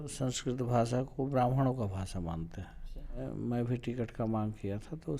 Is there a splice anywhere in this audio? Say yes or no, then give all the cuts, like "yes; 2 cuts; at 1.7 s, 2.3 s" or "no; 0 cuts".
yes; 1 cut; at 3.2 s